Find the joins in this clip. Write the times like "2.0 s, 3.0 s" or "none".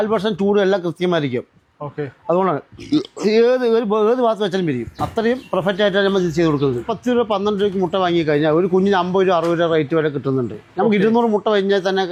none